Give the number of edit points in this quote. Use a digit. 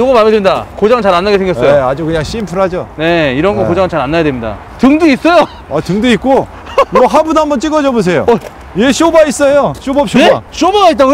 0